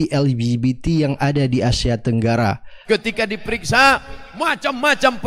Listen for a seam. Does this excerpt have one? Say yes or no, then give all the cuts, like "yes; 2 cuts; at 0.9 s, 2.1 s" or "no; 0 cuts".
yes; 1 cut; at 2.7 s